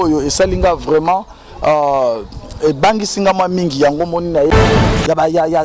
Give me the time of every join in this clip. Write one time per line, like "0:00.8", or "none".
0:04.7

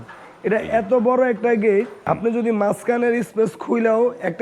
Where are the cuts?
0:02.0

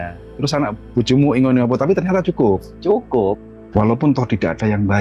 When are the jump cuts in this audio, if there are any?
0:03.4

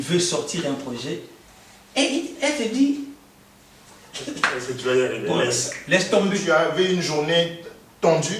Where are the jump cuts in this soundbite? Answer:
0:06.4

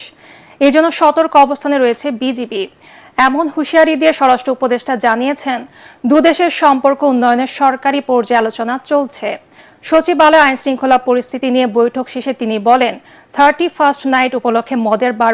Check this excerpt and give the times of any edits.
none

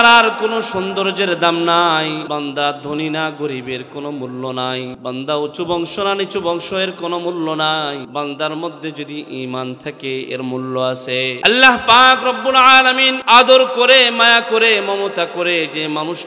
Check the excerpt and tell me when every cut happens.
0:02.2
0:05.0
0:08.1
0:11.4
0:13.1

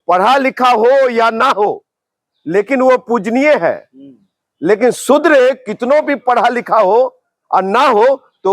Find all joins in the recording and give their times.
none

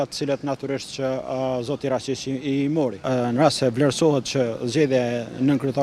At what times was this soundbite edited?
0:03.0

